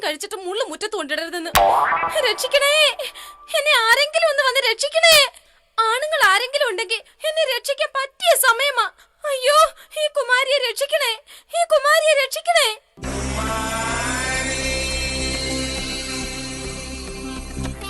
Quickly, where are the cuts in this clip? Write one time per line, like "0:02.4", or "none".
0:06.8